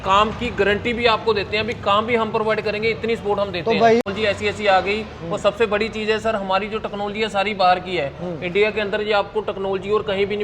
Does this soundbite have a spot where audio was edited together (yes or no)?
yes